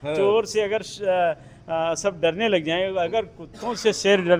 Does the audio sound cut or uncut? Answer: uncut